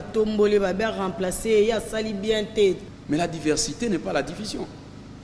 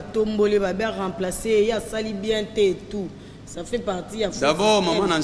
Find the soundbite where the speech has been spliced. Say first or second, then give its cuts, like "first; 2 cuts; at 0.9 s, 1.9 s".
first; 1 cut; at 2.9 s